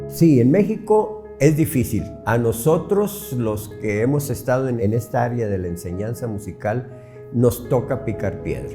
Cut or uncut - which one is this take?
cut